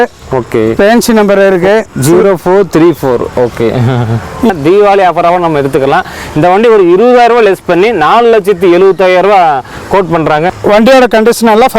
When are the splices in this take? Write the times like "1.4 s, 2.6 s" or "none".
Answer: 4.5 s, 10.6 s